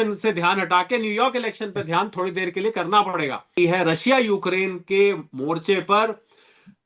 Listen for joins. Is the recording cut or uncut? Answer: cut